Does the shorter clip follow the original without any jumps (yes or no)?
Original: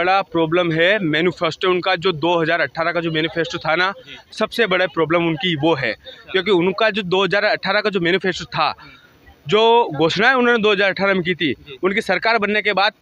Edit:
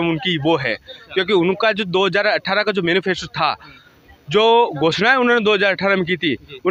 yes